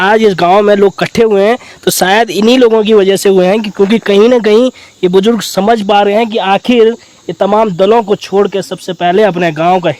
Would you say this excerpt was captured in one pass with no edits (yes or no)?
yes